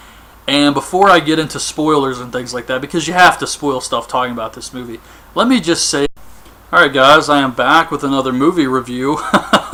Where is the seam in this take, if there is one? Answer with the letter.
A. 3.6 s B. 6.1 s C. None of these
C